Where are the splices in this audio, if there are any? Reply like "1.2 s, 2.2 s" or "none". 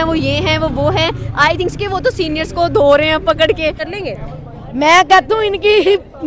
3.8 s

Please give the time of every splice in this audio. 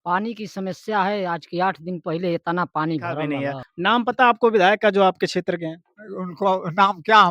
3.3 s

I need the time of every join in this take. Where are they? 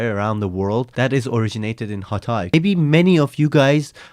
0.9 s, 2.5 s

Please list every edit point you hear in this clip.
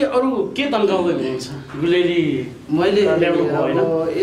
none

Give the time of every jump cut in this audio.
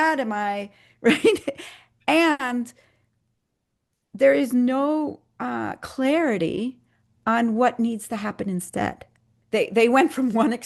9.3 s

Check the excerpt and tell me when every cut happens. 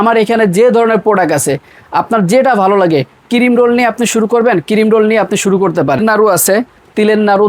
6.0 s

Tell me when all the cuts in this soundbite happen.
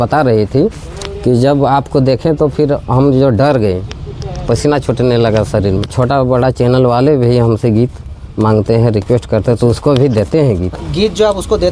5.8 s, 10.7 s

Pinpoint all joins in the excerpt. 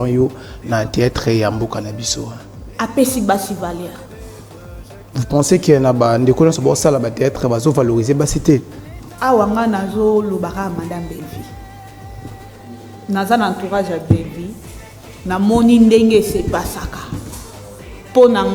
none

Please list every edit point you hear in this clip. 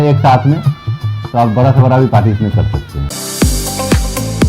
3.0 s

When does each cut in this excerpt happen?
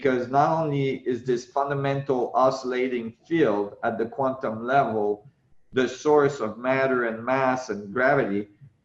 none

